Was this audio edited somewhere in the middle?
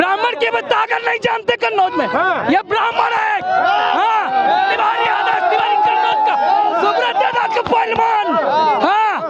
no; 0 cuts

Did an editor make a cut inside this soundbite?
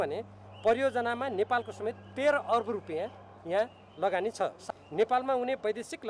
yes; 1 cut; at 4.6 s

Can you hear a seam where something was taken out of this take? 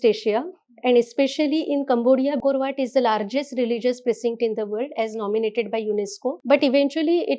yes; 2 cuts; at 2.4 s, 6.3 s

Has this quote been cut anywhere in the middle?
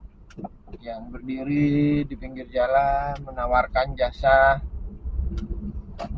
no; 0 cuts

